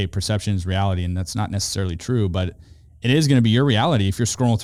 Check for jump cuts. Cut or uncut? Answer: uncut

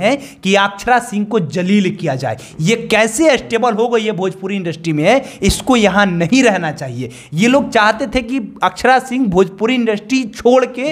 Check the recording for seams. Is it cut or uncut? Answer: uncut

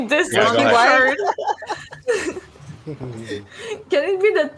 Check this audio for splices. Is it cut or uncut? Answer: cut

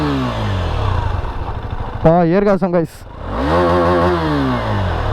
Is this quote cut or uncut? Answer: uncut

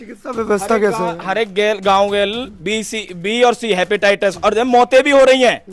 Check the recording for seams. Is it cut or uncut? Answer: uncut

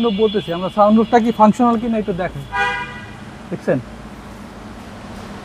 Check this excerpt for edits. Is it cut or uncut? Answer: uncut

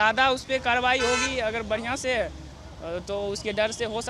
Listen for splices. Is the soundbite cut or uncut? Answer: uncut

